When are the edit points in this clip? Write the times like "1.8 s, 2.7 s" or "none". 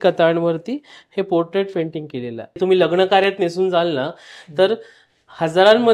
2.6 s